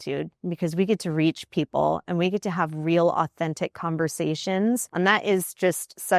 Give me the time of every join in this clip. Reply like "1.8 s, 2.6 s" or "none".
4.9 s